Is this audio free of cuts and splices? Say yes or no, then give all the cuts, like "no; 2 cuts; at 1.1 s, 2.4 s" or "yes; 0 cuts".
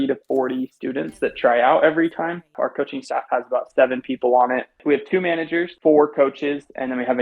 no; 3 cuts; at 2.5 s, 4.8 s, 5.7 s